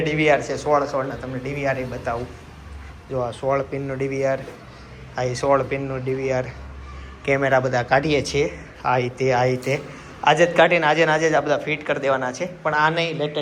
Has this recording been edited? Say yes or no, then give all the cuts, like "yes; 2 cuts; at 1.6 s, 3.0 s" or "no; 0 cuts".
no; 0 cuts